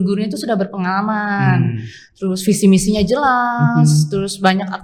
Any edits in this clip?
no; 0 cuts

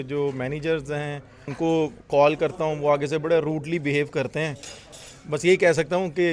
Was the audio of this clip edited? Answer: yes; 1 cut; at 1.5 s

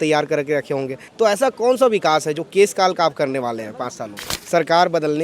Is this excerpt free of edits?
no; 2 cuts; at 1.0 s, 4.3 s

